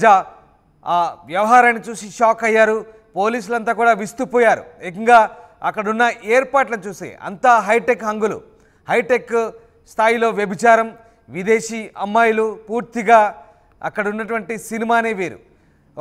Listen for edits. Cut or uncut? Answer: uncut